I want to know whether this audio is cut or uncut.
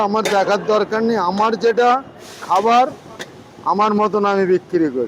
uncut